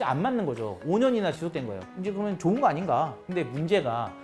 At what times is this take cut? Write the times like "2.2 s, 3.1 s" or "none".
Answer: 3.2 s